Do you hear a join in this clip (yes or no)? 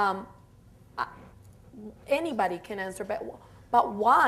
yes